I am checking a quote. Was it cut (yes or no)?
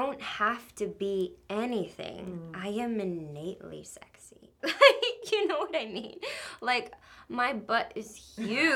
no